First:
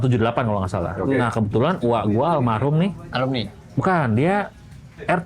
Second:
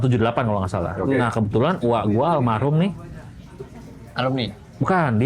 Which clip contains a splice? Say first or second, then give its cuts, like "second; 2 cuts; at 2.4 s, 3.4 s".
first; 1 cut; at 3.0 s